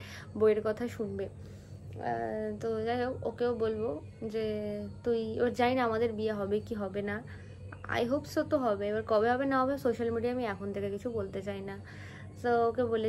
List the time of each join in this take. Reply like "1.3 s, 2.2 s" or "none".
none

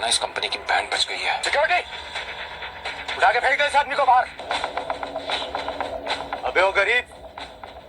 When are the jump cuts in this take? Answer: 1.4 s, 4.4 s

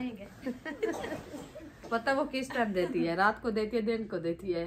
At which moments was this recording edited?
none

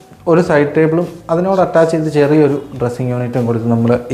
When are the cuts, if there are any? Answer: none

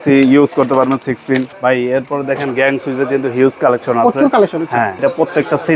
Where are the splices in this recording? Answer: 1.5 s, 4.9 s

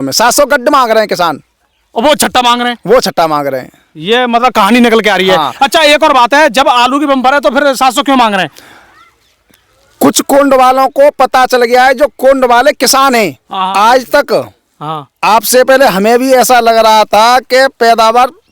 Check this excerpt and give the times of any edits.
13.5 s

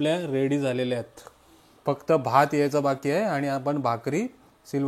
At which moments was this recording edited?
none

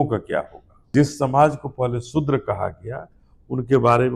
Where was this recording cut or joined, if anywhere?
0.9 s

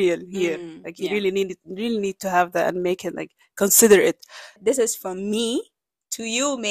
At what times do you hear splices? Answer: 4.6 s

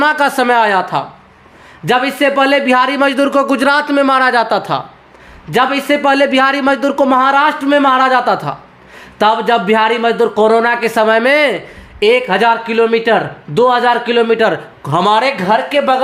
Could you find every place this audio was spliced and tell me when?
none

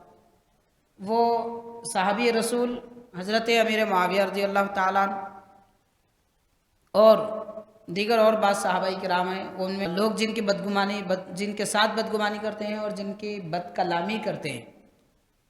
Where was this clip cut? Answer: 9.9 s

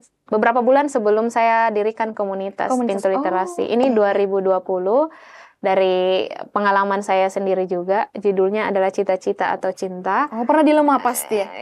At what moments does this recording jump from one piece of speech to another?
none

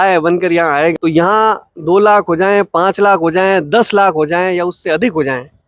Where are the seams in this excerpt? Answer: 0.9 s

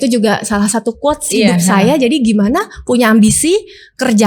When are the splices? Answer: none

